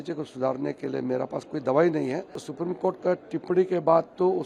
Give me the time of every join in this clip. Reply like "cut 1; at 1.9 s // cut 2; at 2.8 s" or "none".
cut 1; at 2.4 s